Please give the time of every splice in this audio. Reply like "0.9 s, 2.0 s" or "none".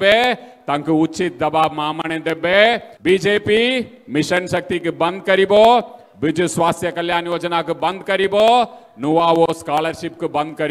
2.9 s